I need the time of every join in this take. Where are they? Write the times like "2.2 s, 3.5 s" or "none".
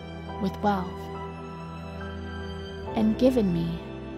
0.9 s, 2.9 s